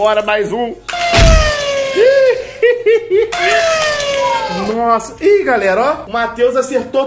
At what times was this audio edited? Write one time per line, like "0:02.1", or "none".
0:06.1